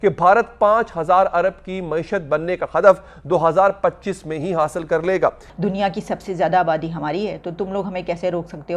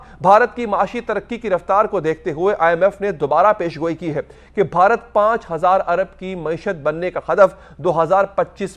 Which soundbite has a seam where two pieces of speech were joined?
first; 1 cut; at 5.5 s

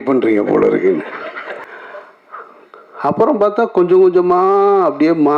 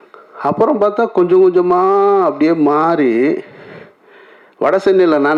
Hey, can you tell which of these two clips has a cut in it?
first; 1 cut; at 1.6 s

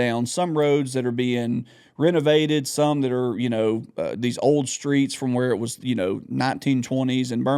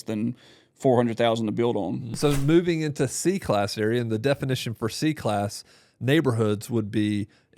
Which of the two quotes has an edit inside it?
second; 1 cut; at 2.0 s

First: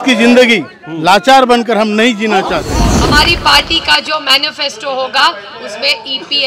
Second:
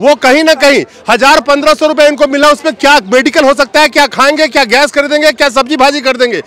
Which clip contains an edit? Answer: first; 1 cut; at 2.9 s

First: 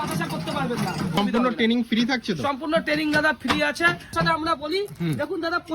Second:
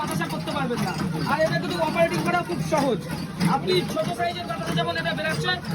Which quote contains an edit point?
first; 2 cuts; at 1.2 s, 4.1 s

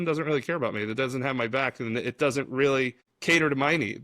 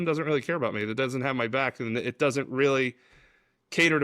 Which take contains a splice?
first; 1 cut; at 3.1 s

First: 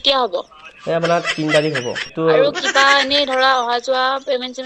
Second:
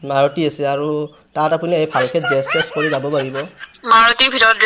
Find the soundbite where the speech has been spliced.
first; 1 cut; at 2.1 s

